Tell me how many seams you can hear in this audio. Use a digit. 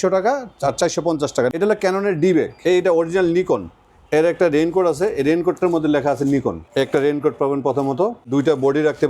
4